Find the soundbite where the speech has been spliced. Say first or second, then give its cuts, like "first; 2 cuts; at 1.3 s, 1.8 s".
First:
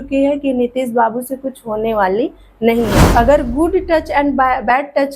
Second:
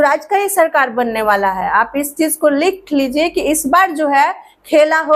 first; 1 cut; at 3.0 s